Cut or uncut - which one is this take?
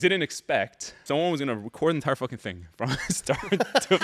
cut